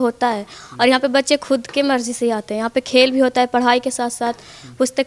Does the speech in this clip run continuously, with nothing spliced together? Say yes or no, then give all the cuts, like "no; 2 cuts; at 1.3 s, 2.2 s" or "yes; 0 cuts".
yes; 0 cuts